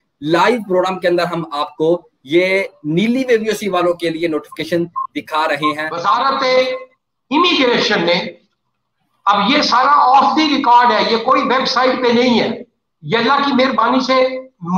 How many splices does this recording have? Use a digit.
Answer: 1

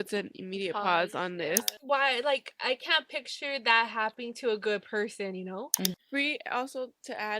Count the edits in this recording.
2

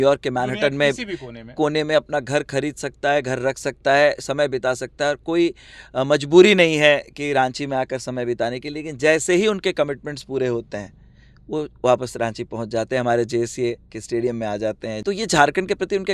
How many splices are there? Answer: 1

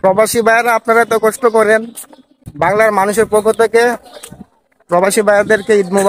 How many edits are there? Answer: 0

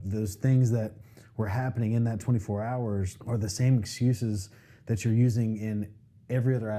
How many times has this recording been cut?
1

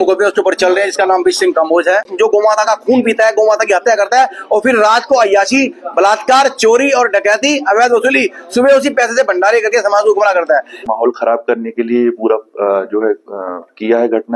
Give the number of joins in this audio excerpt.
2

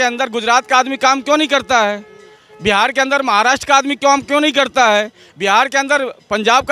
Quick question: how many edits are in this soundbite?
0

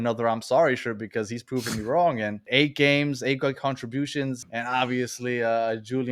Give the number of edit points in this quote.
2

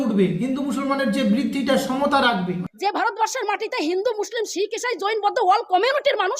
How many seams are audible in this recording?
1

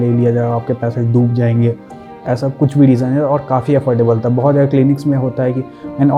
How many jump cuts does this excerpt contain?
0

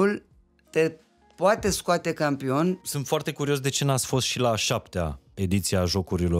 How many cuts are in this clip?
2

